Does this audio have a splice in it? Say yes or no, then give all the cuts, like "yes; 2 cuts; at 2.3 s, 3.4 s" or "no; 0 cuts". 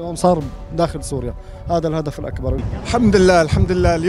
yes; 1 cut; at 2.7 s